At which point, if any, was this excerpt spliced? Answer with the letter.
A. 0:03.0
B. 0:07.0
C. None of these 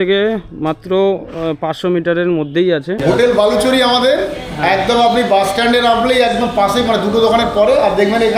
A